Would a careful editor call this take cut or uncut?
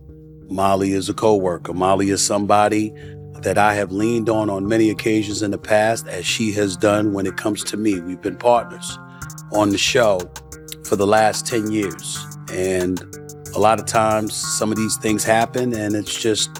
uncut